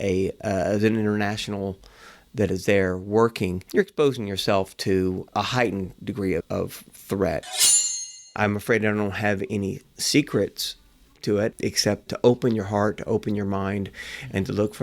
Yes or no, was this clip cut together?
yes